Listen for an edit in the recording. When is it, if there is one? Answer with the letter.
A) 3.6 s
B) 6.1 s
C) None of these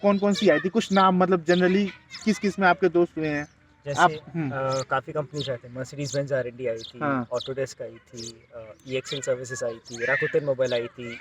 C